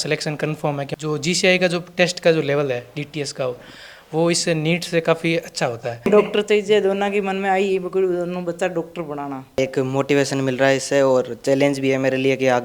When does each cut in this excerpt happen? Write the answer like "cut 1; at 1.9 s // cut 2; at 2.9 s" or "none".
cut 1; at 0.9 s // cut 2; at 6.1 s // cut 3; at 9.6 s